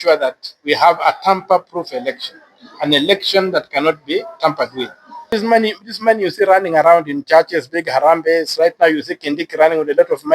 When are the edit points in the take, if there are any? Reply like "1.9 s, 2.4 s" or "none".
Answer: 5.3 s